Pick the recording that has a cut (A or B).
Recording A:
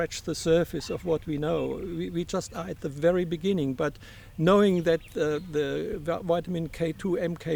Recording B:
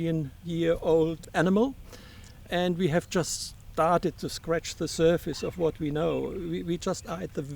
B